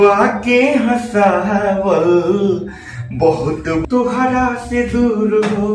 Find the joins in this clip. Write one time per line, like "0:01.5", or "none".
0:03.8